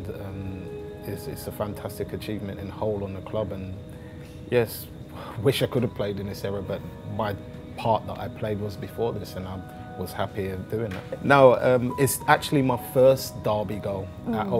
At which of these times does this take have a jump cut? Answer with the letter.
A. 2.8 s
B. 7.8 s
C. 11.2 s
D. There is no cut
C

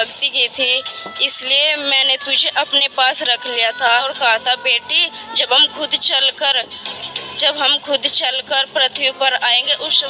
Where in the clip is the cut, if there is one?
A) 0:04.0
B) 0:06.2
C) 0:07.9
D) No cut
A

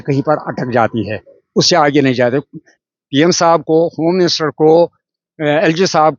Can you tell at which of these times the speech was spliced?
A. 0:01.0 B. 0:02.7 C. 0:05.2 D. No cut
B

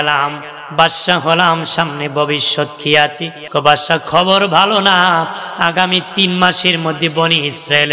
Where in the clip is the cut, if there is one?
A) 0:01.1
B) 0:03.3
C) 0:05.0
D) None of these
B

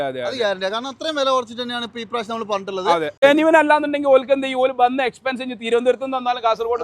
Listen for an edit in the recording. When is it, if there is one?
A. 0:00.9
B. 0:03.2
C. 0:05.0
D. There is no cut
B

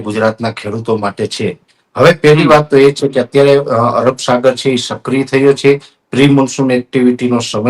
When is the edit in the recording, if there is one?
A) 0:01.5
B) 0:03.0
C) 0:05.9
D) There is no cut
D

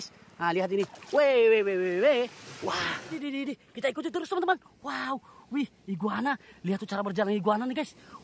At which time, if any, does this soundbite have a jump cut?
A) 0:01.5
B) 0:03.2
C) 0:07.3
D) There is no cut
B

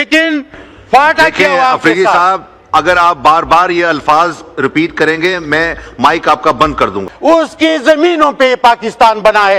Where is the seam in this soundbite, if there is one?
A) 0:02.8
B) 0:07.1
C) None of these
B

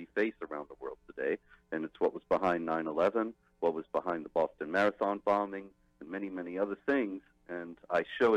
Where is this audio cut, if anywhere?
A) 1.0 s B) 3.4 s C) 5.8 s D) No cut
A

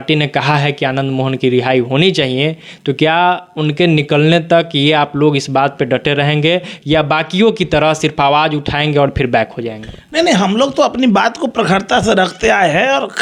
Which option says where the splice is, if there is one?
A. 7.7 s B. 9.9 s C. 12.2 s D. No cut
D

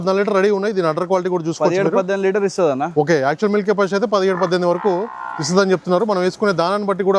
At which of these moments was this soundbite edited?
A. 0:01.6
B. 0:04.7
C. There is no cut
C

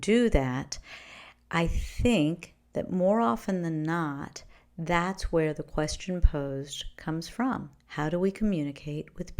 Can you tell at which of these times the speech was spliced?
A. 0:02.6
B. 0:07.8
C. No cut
B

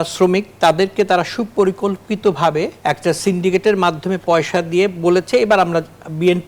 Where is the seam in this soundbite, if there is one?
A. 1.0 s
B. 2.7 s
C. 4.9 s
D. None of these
B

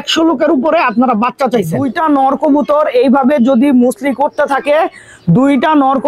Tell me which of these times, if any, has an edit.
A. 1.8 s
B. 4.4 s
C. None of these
A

